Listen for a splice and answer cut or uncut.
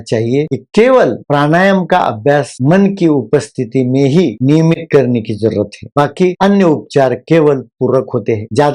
uncut